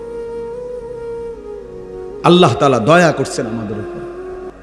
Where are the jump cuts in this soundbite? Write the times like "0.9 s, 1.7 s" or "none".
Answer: 2.2 s, 3.8 s